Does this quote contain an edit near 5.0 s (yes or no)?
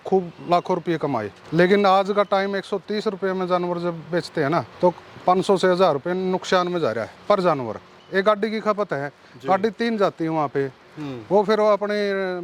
no